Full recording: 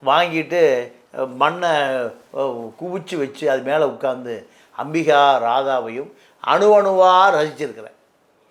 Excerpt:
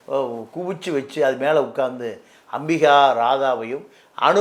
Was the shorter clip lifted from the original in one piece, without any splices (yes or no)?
yes